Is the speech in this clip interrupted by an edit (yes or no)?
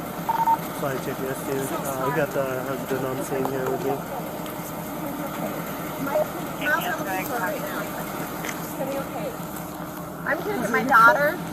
no